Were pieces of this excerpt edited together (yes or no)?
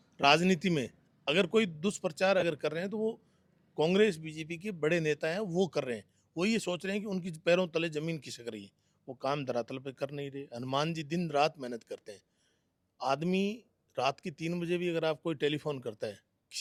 no